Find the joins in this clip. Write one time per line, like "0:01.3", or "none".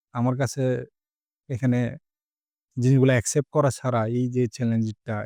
none